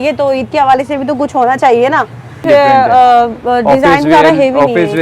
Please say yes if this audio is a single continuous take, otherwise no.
no